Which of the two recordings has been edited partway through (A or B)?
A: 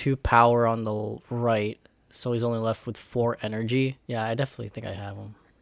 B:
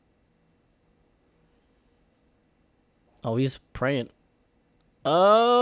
A